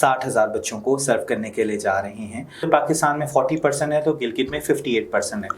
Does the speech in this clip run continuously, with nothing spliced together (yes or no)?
no